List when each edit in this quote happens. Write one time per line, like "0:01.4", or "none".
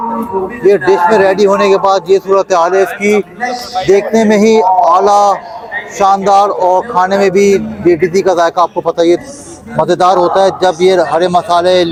none